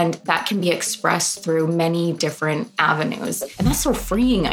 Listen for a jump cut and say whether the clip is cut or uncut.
cut